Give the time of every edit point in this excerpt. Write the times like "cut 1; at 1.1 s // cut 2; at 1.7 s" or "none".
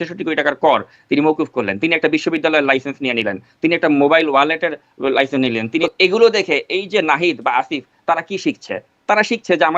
cut 1; at 5.8 s